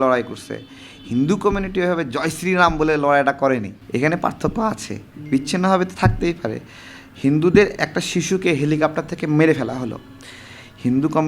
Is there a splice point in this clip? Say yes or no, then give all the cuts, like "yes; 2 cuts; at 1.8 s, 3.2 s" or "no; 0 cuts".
yes; 1 cut; at 3.8 s